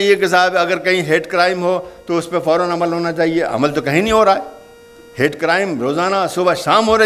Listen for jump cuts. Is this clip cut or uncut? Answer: uncut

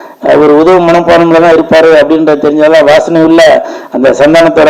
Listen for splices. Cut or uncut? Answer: uncut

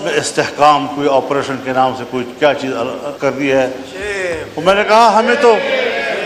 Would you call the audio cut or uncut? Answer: cut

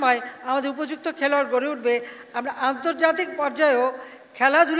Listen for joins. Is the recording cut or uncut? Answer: uncut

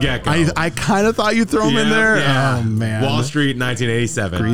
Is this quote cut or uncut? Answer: uncut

